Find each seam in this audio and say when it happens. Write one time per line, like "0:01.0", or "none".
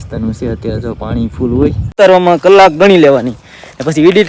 0:01.9